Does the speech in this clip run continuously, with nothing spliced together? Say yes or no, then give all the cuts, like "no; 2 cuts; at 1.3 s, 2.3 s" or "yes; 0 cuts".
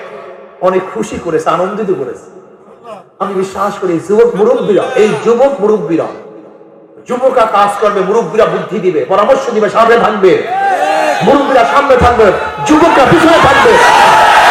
yes; 0 cuts